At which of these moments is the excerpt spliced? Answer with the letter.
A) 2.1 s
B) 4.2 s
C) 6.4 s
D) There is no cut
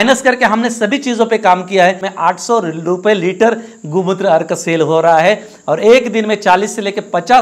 A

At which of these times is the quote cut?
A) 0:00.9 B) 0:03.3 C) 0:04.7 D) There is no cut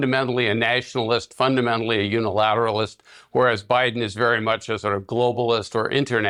D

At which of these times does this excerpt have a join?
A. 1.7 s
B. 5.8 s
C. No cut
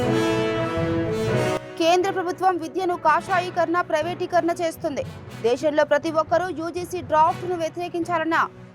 A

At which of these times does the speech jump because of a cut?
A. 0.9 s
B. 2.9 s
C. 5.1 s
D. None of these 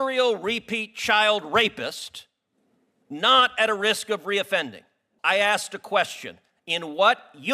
C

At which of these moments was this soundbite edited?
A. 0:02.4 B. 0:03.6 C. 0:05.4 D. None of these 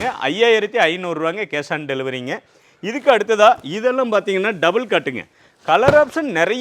D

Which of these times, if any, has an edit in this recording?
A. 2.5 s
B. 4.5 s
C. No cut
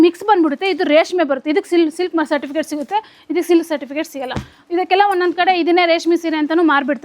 C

